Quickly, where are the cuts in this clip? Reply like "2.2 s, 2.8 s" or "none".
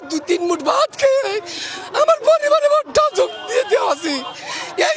none